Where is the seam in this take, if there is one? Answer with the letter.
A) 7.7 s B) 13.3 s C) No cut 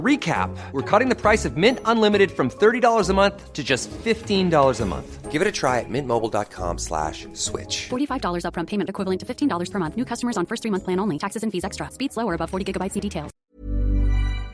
B